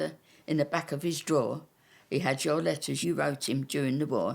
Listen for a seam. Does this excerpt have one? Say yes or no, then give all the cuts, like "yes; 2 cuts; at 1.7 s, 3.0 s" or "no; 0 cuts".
yes; 1 cut; at 2.9 s